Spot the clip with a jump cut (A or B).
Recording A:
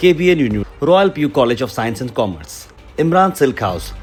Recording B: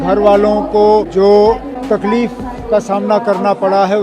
B